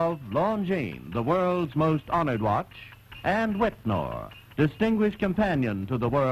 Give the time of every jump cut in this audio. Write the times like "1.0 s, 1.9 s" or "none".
3.6 s